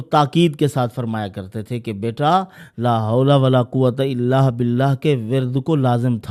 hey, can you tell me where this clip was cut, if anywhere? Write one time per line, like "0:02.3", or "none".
none